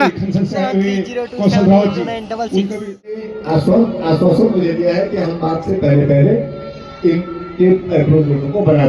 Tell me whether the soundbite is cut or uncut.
cut